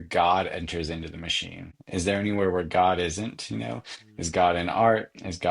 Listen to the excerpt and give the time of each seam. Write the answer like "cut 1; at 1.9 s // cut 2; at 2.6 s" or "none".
cut 1; at 1.8 s

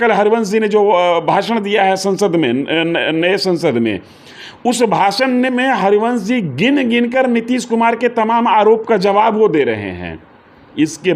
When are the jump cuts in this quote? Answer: none

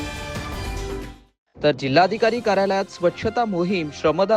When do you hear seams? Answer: none

